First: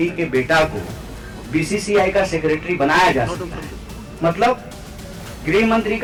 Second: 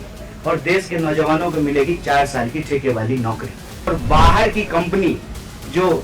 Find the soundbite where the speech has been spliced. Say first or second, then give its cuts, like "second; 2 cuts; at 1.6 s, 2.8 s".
second; 1 cut; at 3.9 s